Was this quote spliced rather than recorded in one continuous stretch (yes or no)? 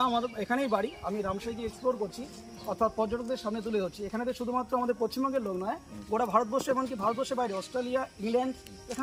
no